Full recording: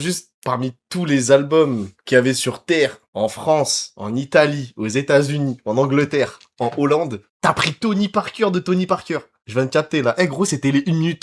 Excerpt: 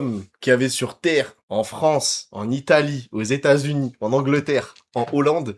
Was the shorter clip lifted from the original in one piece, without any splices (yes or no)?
yes